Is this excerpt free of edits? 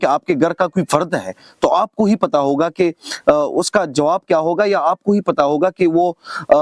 yes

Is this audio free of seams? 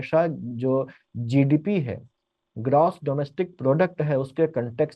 yes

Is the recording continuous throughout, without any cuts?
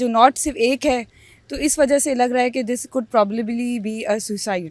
yes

